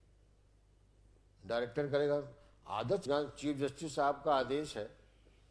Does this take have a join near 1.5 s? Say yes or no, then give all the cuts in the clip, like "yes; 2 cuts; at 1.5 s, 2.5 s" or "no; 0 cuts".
no; 1 cut; at 3.0 s